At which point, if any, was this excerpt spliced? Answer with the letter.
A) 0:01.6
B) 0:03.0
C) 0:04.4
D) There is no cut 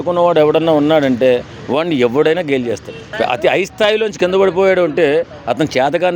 B